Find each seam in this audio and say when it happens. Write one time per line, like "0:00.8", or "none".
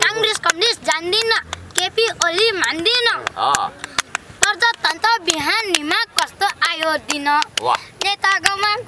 none